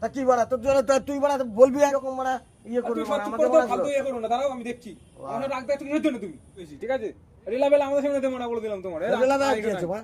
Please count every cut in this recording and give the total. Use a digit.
2